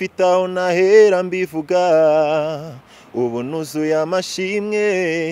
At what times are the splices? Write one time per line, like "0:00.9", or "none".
none